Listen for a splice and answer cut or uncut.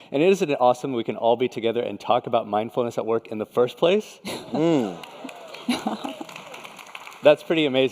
cut